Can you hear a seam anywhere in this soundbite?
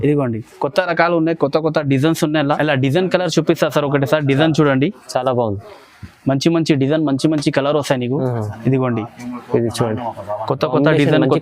yes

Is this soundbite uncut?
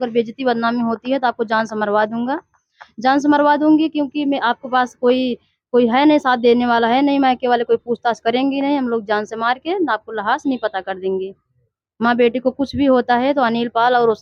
yes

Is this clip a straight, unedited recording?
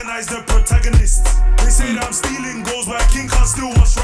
yes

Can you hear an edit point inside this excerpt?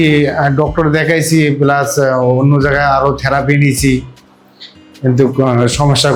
no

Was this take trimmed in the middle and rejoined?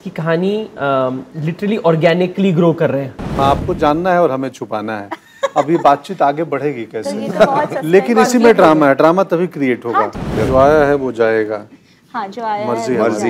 yes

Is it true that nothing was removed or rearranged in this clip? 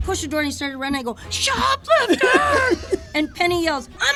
yes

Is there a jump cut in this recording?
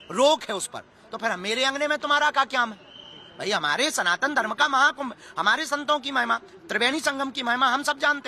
no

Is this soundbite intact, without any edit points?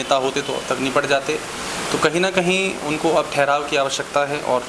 yes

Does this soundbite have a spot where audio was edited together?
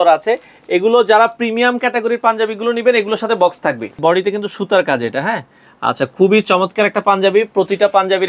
yes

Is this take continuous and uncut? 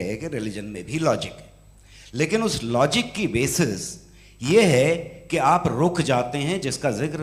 yes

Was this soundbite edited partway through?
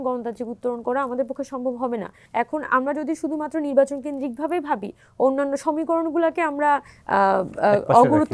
yes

